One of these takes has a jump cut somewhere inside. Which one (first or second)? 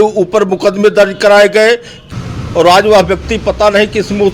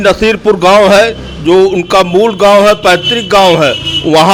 first